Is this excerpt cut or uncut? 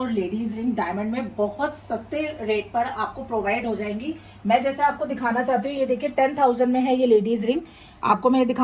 uncut